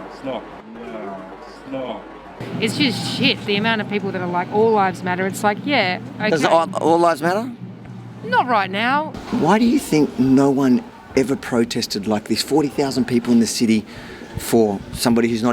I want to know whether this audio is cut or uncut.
cut